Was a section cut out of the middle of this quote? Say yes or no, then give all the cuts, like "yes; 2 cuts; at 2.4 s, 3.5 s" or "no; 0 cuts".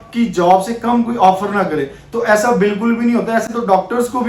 no; 0 cuts